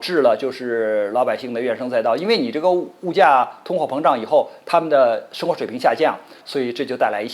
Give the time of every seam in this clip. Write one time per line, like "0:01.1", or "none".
0:06.4